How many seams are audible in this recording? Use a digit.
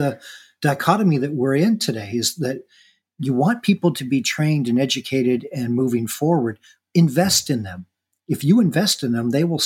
0